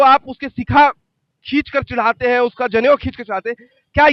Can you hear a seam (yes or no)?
no